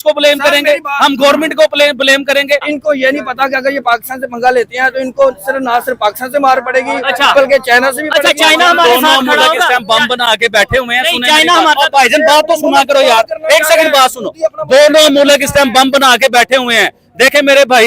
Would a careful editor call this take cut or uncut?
cut